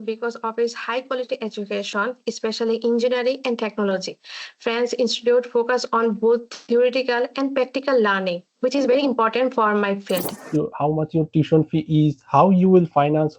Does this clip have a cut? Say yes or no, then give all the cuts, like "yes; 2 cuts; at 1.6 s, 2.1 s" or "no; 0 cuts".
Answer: yes; 1 cut; at 10.4 s